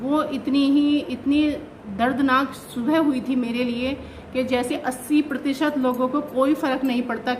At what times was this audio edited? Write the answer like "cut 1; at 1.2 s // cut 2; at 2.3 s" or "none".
cut 1; at 4.7 s